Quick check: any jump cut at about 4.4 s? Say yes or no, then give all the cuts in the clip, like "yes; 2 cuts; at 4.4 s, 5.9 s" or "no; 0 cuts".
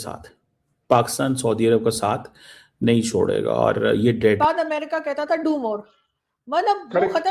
yes; 1 cut; at 4.4 s